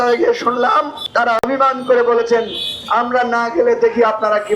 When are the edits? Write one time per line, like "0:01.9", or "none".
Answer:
0:01.0